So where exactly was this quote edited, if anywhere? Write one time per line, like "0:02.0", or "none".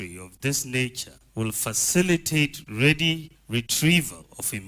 none